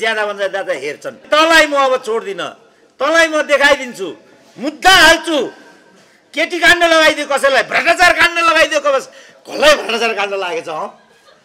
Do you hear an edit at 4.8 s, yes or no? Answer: no